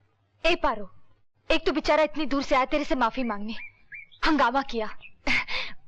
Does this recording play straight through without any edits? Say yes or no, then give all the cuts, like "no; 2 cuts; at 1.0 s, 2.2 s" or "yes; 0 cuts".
yes; 0 cuts